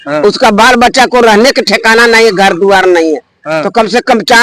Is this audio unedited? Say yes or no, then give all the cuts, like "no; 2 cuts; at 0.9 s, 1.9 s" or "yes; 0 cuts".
yes; 0 cuts